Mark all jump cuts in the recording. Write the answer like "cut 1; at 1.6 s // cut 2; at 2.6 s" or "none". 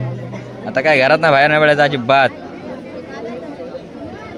none

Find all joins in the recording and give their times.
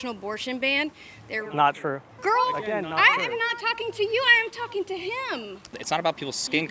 cut 1; at 2.1 s // cut 2; at 5.8 s

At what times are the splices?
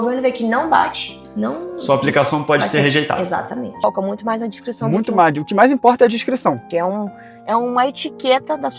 cut 1; at 3.7 s // cut 2; at 6.6 s

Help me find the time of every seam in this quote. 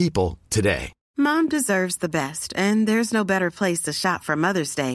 cut 1; at 1.0 s

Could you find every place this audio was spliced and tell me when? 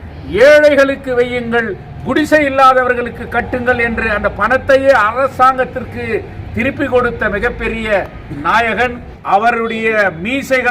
cut 1; at 9.1 s

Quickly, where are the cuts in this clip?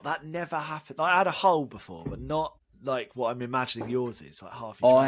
cut 1; at 2.7 s

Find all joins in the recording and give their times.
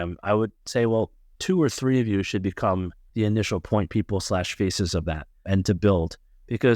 cut 1; at 1.3 s // cut 2; at 3.0 s // cut 3; at 5.3 s

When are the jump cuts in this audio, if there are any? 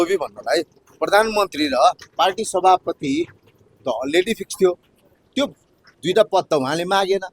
none

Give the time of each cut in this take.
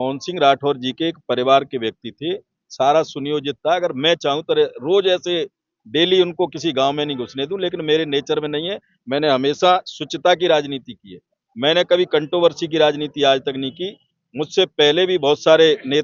none

